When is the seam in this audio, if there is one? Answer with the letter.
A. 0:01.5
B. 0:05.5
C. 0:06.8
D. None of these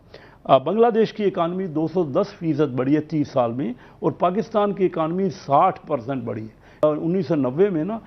C